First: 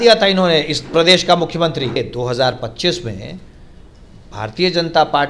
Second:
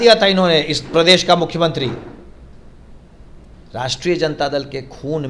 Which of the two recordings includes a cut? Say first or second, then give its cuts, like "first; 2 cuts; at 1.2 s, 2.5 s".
first; 1 cut; at 2.0 s